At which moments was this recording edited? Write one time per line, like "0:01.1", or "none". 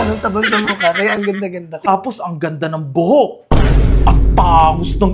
0:01.9